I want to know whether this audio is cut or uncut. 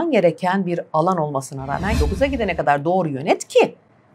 cut